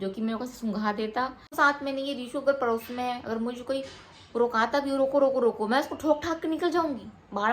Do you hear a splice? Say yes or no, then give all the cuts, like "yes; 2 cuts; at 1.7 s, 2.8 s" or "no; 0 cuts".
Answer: yes; 1 cut; at 1.5 s